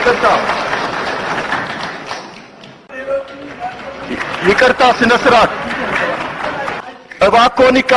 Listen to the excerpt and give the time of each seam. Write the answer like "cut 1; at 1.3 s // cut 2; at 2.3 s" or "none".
cut 1; at 6.8 s

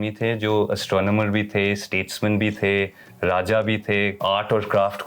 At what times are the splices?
cut 1; at 4.1 s

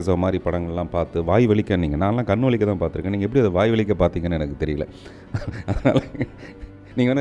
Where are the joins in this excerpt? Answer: none

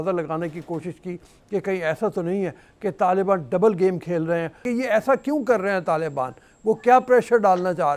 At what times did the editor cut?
cut 1; at 4.6 s

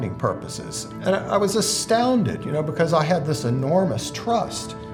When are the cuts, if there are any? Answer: none

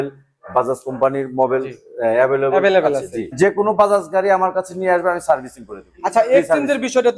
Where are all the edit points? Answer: cut 1; at 3.3 s

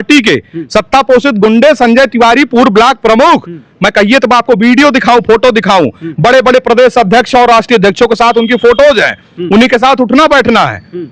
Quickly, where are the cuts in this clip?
none

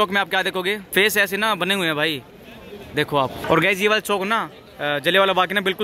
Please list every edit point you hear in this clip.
cut 1; at 0.9 s // cut 2; at 3.4 s

